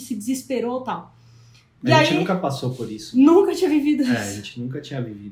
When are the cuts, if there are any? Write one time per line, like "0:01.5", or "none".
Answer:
none